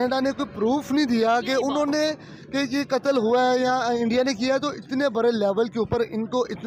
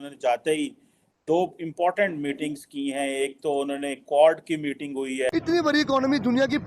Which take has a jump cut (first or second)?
second